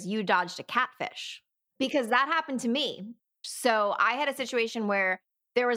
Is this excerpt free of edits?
no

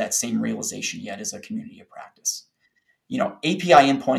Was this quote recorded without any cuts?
yes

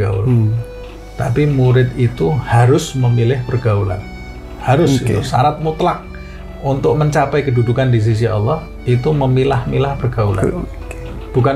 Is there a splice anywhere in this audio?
no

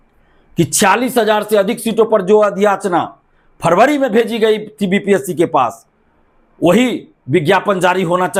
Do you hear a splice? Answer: no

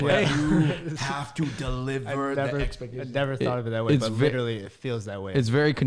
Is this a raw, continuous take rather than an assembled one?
yes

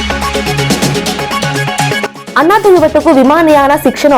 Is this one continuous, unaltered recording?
no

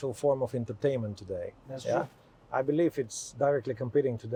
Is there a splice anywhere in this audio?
no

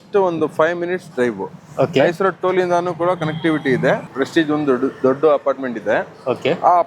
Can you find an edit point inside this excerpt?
yes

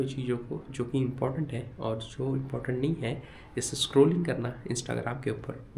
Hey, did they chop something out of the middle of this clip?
no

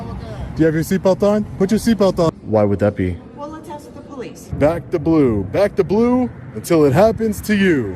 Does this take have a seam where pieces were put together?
yes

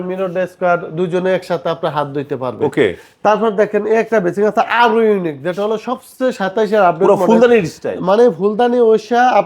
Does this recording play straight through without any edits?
yes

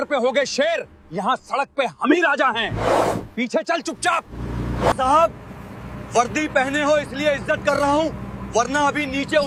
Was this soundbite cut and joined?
no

